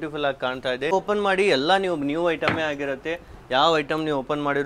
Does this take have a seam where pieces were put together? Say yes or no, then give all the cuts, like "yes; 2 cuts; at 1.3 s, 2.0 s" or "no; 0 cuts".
yes; 1 cut; at 0.9 s